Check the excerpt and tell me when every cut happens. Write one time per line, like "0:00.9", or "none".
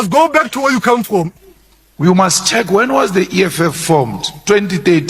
0:01.3